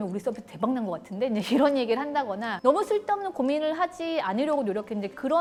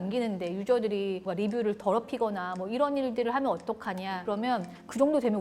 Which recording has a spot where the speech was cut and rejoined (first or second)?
second